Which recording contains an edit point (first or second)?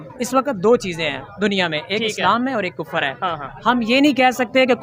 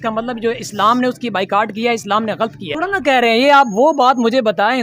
second